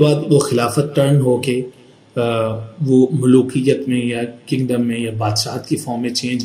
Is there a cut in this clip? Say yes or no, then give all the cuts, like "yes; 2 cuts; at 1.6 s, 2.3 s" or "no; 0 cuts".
no; 0 cuts